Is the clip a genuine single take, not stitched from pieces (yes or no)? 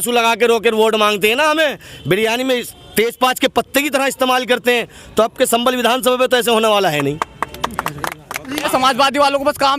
no